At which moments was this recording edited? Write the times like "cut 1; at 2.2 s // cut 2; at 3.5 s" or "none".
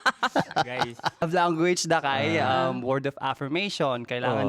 cut 1; at 1.2 s

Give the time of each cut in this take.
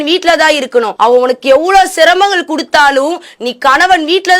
cut 1; at 0.9 s

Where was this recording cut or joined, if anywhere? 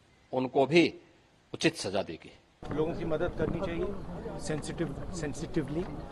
cut 1; at 2.6 s

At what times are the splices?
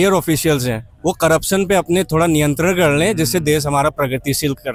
none

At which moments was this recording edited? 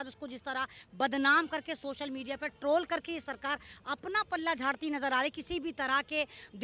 none

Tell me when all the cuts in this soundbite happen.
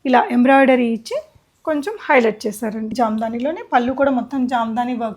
cut 1; at 2.9 s

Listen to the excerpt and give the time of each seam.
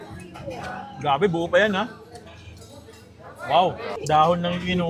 cut 1; at 4.0 s

